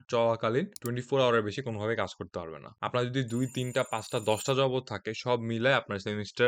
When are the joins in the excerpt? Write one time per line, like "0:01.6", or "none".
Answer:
none

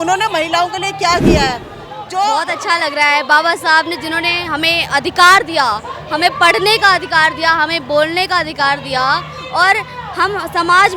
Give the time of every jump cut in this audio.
0:02.3

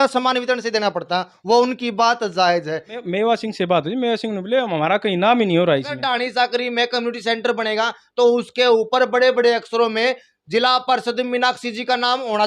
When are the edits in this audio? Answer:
0:03.0
0:06.0

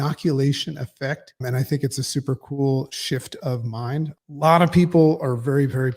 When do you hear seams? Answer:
0:01.4
0:04.1

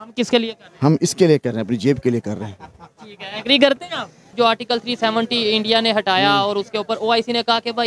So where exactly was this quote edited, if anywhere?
0:04.3

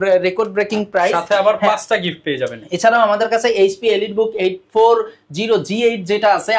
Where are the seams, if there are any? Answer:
none

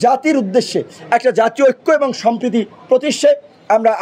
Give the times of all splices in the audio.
none

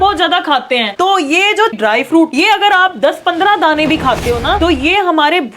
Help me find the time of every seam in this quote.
0:00.9
0:02.3

